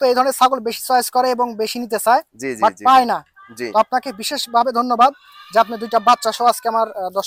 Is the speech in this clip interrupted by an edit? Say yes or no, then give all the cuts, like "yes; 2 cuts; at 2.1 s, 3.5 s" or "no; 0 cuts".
no; 0 cuts